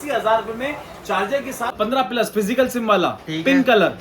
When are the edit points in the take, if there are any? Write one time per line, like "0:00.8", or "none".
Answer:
0:01.7